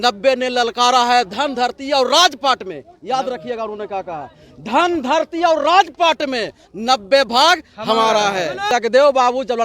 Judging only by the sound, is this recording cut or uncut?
cut